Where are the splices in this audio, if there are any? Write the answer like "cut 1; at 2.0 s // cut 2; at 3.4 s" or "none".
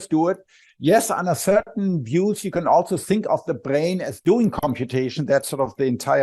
cut 1; at 4.1 s

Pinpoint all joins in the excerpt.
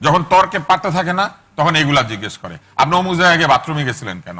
none

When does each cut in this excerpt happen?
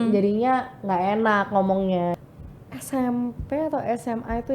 cut 1; at 2.1 s

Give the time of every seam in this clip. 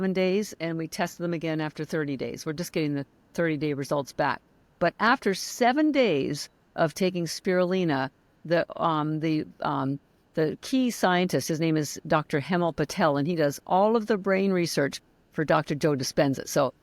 none

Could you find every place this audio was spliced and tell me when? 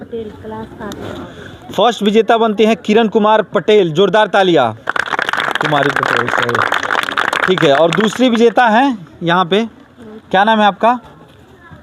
cut 1; at 1.2 s

